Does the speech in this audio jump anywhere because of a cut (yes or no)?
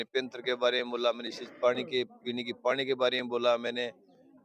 no